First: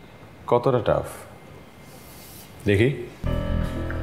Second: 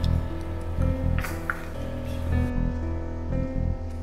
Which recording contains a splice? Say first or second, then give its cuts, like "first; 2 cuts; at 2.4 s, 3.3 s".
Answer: second; 1 cut; at 1.7 s